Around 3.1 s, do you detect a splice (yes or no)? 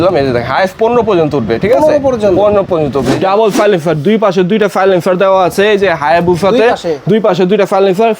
yes